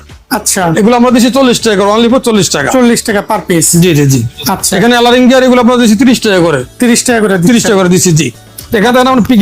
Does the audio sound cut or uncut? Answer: uncut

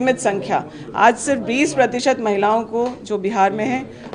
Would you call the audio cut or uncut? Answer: uncut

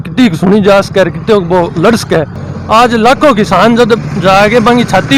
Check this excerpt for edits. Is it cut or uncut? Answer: cut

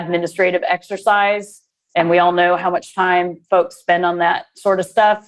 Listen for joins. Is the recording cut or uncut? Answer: uncut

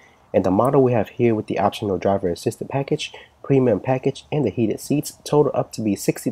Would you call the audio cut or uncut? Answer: cut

